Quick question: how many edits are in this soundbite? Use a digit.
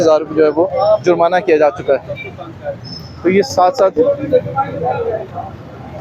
0